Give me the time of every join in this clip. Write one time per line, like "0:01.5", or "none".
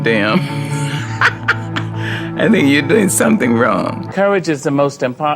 0:04.1